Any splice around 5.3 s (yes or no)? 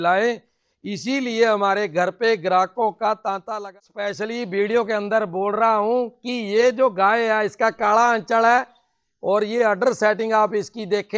no